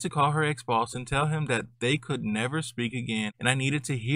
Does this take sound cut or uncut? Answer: uncut